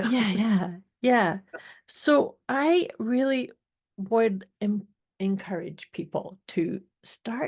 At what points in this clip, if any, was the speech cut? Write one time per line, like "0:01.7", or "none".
0:05.0